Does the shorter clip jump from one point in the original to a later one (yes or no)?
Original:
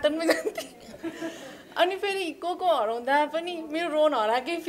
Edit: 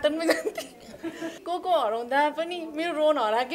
yes